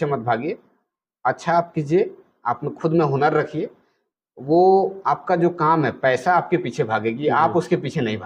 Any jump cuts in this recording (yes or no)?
no